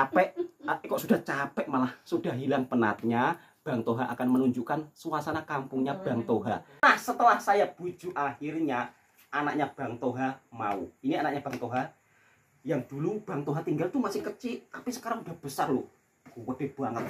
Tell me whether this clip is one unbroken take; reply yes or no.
no